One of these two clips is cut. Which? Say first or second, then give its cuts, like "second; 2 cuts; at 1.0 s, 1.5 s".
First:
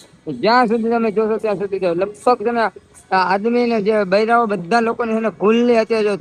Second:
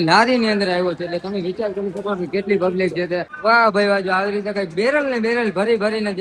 second; 1 cut; at 3.3 s